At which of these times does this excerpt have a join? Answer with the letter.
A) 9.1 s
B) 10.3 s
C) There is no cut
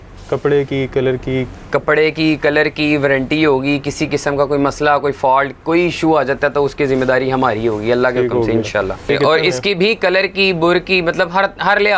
A